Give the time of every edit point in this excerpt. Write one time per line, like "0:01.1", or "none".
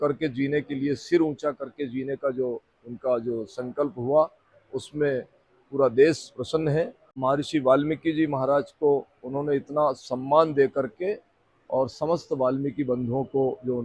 0:07.1